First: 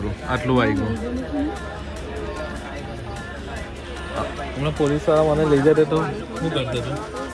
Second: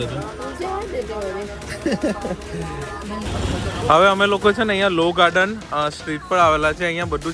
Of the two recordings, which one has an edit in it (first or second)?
second